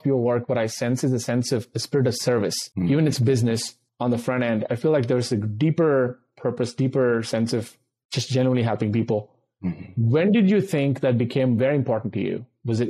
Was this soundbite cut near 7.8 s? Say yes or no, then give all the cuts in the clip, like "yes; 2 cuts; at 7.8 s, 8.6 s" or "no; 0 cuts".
no; 0 cuts